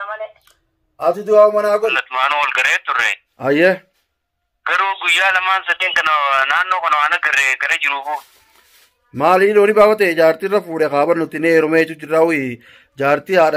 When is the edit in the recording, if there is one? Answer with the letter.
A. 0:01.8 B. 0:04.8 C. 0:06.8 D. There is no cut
A